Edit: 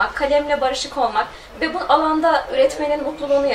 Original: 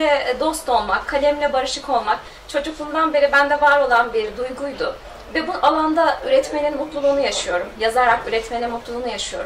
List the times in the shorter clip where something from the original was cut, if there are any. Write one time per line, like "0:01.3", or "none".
0:01.4